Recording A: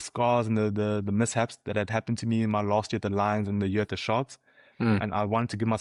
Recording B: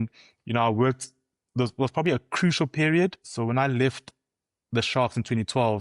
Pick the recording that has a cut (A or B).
B